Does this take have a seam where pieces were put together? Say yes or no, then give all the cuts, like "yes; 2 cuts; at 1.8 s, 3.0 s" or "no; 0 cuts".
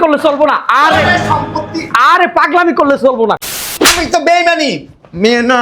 yes; 1 cut; at 3.4 s